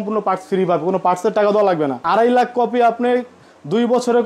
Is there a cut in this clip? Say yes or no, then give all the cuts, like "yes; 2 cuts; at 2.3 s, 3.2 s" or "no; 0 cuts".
yes; 1 cut; at 2.0 s